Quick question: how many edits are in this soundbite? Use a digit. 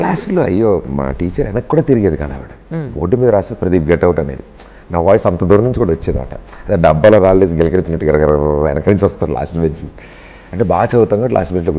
0